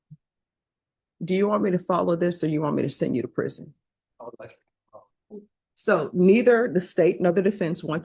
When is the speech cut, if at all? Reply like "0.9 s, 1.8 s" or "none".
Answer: 5.2 s